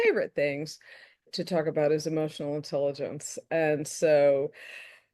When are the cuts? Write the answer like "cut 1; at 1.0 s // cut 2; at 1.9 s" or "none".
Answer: cut 1; at 1.3 s